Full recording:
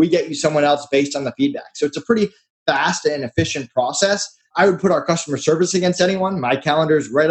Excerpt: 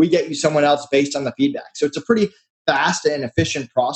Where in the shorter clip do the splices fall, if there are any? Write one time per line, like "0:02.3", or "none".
none